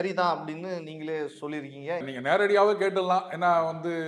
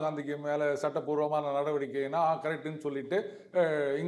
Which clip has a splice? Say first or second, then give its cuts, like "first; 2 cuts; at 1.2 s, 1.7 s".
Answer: first; 1 cut; at 2.0 s